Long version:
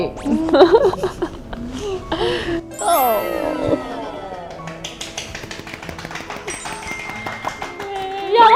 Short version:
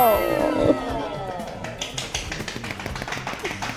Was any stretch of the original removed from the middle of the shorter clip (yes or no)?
no